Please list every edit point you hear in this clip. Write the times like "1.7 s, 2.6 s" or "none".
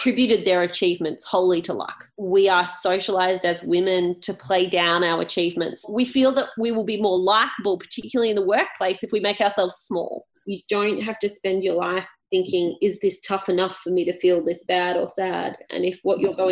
2.1 s, 5.9 s, 10.4 s, 15.6 s